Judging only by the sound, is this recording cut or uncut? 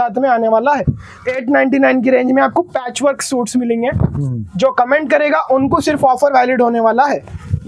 cut